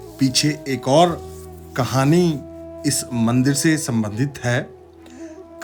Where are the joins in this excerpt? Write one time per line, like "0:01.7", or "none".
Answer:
none